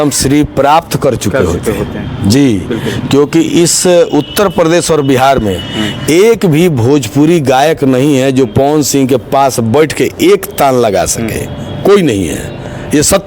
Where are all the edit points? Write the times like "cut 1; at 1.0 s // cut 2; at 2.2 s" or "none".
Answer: none